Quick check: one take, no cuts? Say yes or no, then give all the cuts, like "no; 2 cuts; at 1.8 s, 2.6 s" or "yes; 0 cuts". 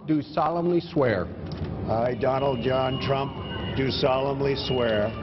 yes; 0 cuts